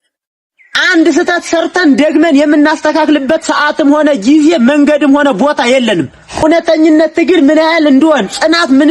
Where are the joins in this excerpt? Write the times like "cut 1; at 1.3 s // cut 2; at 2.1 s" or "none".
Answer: cut 1; at 6.3 s